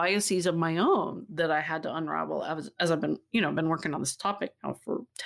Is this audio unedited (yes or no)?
yes